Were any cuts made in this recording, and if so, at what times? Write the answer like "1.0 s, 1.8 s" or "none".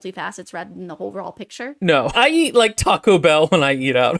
2.2 s